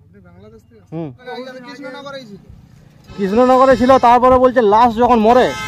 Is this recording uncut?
no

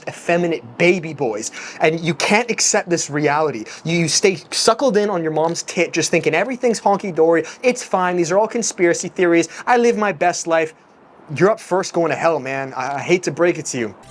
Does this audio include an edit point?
no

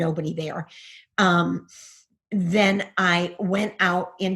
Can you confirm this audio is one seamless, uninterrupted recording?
yes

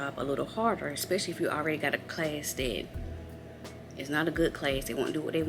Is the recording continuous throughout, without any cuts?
yes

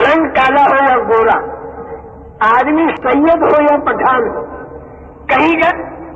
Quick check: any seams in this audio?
yes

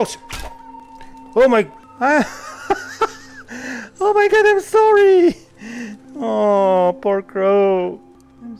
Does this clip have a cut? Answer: yes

